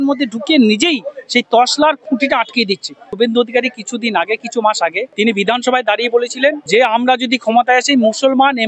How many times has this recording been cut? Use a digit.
3